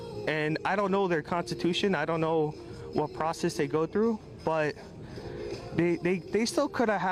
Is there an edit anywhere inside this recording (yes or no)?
no